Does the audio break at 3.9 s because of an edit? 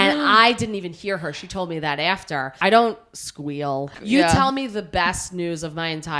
yes; 2 cuts; at 2.5 s, 3.9 s

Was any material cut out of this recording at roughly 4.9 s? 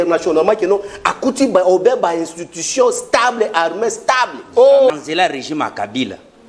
yes; 1 cut; at 4.9 s

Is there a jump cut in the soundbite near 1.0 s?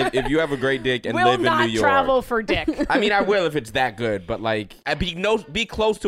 no; 1 cut; at 4.8 s

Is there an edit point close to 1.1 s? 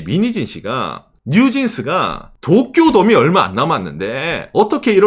yes; 1 cut; at 1.1 s

